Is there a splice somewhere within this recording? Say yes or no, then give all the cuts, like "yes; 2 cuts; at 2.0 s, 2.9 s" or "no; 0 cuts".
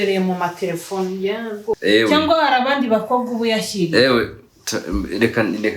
yes; 1 cut; at 1.7 s